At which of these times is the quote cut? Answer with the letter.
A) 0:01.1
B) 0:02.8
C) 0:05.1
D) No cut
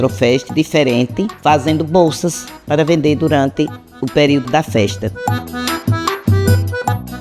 C